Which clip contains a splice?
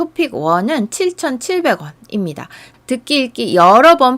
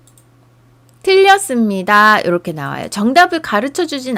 first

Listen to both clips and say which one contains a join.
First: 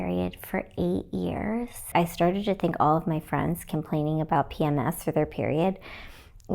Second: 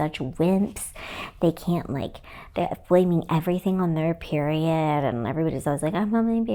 first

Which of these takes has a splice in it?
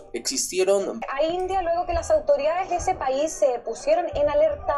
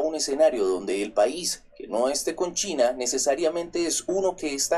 first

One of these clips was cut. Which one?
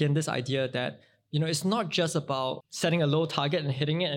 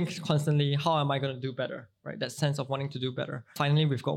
first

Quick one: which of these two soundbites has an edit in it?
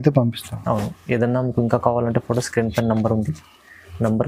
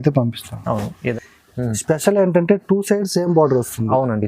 second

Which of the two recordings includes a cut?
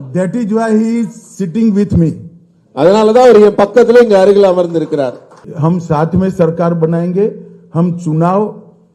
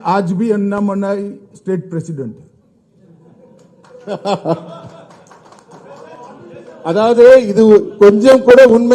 first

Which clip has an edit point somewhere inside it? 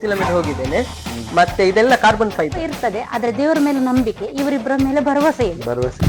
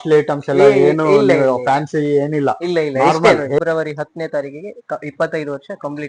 second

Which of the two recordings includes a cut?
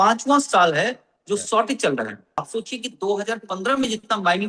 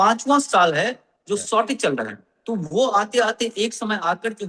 first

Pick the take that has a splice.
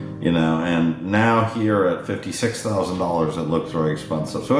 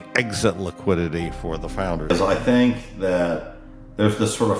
second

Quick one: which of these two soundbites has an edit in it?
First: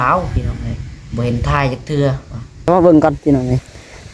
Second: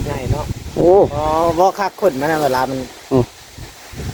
first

